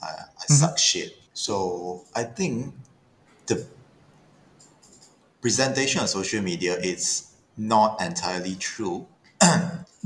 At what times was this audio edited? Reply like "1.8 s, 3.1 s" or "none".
none